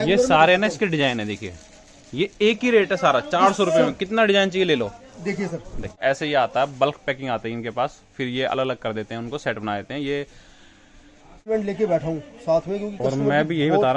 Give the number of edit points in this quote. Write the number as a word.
two